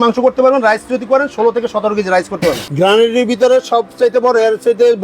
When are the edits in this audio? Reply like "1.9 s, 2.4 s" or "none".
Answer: 2.7 s